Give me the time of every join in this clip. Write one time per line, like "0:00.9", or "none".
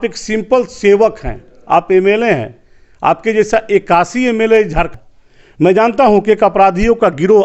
0:04.9